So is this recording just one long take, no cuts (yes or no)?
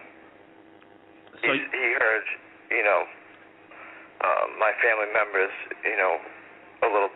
yes